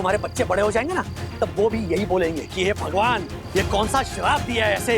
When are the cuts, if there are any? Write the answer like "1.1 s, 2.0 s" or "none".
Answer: 3.3 s